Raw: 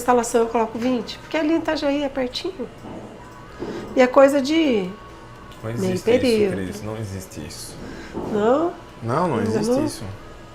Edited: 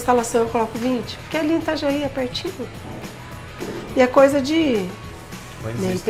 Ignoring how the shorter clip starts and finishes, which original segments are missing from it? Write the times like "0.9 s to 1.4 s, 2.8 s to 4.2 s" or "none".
none